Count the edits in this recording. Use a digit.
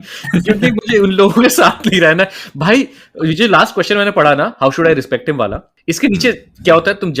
1